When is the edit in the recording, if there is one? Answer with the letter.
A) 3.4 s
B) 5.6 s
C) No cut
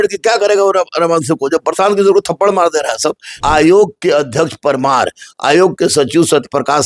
A